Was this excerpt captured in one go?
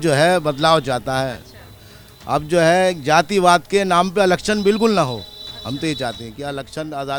yes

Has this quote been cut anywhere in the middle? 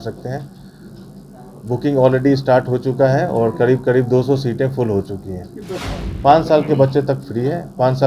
yes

